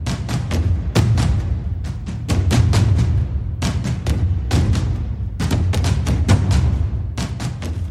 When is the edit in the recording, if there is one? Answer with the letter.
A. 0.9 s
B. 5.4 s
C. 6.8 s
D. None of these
C